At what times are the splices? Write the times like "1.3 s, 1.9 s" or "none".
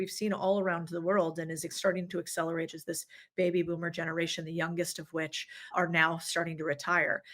2.8 s, 5.7 s